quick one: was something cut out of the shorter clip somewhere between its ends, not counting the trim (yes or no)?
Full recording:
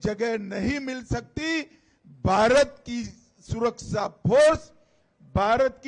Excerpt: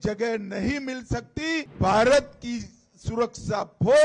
yes